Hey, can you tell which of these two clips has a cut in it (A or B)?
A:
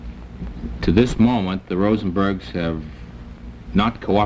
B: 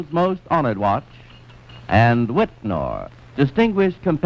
B